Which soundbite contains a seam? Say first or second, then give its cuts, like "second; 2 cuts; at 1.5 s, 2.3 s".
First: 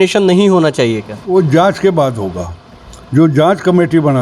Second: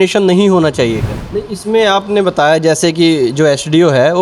second; 1 cut; at 1.1 s